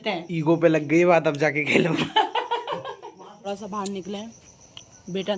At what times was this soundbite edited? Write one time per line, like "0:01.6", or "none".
none